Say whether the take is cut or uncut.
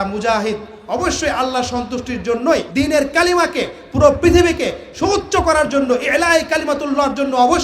uncut